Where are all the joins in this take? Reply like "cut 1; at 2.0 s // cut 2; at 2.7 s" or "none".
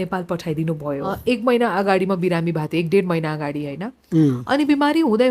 cut 1; at 1.1 s

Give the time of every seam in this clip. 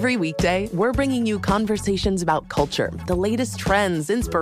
none

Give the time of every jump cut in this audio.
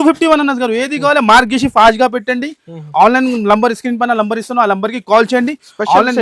none

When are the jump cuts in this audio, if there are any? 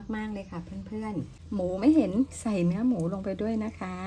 cut 1; at 1.4 s

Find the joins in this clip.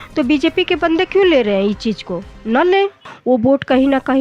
cut 1; at 3.1 s

